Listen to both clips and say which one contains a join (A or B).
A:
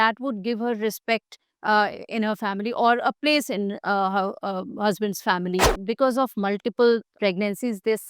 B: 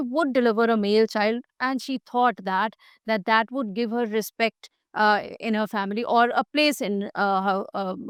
A